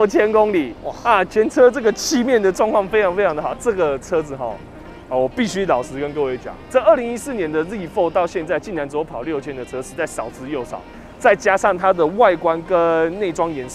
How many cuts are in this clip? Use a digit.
0